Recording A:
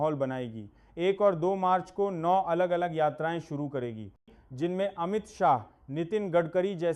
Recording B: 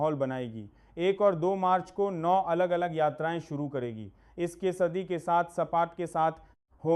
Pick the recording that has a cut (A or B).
A